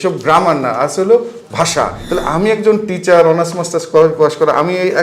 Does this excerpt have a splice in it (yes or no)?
yes